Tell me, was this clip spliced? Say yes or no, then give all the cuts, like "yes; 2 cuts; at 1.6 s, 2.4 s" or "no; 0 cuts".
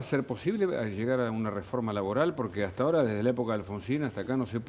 no; 0 cuts